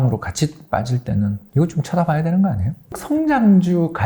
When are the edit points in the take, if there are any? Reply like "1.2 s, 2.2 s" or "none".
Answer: 1.4 s, 3.0 s

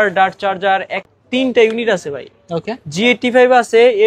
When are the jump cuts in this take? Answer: 1.0 s

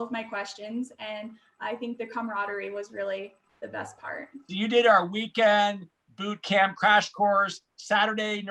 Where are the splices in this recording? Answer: none

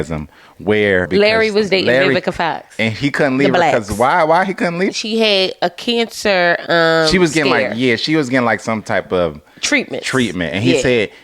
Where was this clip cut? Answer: 1.1 s, 4.9 s

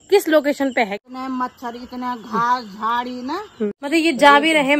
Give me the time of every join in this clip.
1.0 s, 3.7 s

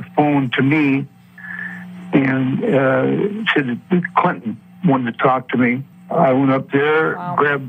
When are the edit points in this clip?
5.9 s

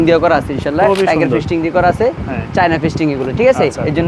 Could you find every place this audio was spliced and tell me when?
none

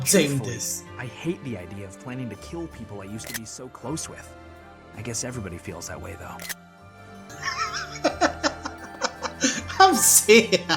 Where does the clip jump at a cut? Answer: 7.3 s

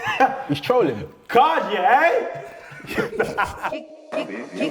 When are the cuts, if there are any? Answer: 3.7 s

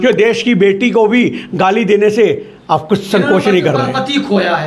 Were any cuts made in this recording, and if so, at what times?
none

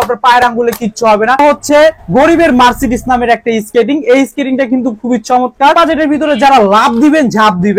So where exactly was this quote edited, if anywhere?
1.4 s, 5.7 s

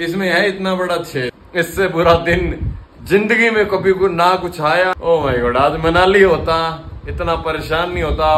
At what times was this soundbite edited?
1.4 s

